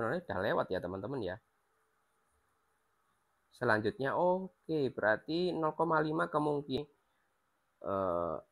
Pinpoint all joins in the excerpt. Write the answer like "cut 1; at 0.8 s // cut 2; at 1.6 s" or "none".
cut 1; at 6.8 s